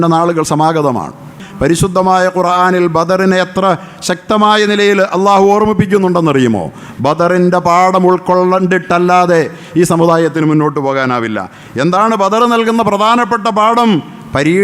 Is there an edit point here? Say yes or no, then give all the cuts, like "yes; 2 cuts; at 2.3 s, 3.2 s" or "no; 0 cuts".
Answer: yes; 1 cut; at 1.4 s